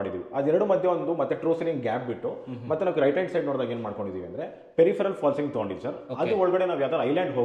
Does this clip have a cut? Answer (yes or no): no